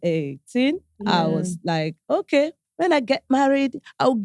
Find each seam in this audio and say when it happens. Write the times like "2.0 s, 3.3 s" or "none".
2.6 s